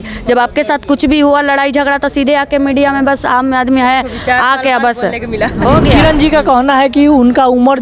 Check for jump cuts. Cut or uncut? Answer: cut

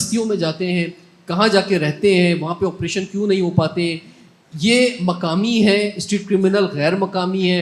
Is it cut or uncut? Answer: uncut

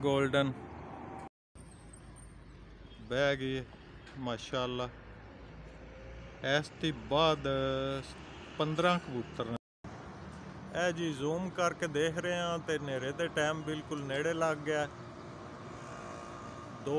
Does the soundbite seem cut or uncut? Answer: cut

